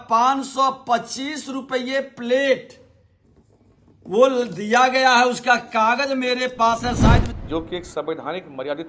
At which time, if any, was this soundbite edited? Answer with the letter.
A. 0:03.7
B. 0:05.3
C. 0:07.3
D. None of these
C